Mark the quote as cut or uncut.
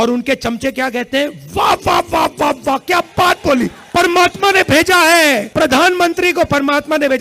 cut